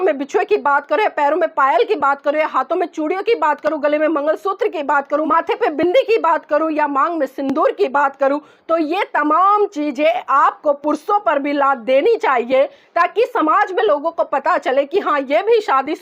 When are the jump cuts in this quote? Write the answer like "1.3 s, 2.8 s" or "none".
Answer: 5.3 s

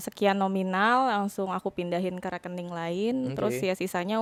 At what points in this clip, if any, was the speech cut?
none

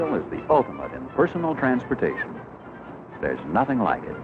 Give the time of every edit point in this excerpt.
2.2 s

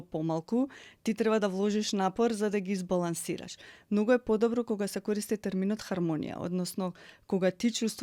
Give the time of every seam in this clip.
none

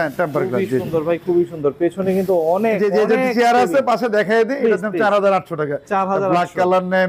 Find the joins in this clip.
none

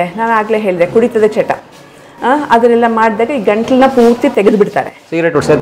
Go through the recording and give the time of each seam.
none

